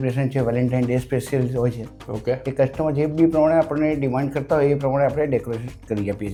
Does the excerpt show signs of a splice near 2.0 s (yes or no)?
no